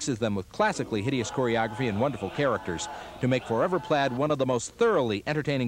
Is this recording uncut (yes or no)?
no